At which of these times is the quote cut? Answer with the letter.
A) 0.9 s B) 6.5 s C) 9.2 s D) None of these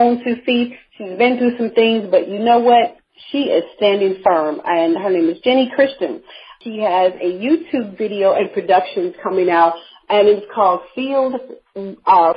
B